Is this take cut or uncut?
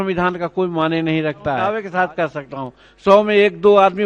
cut